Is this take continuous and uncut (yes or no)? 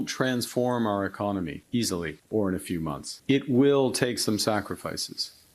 no